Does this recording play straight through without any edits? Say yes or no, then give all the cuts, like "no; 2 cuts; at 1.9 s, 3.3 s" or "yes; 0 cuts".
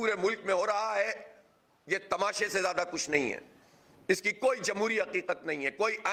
yes; 0 cuts